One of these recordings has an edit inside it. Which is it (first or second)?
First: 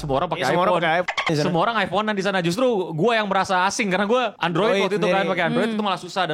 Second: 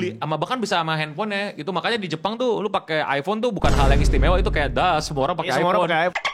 first